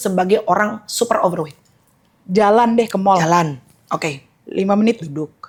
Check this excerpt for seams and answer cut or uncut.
uncut